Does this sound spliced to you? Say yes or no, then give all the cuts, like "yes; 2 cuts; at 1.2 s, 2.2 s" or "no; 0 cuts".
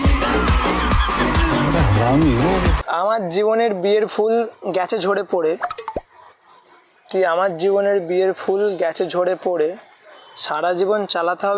yes; 1 cut; at 2.8 s